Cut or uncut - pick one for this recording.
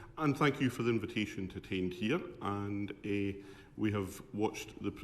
cut